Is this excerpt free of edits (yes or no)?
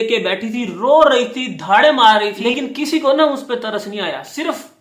no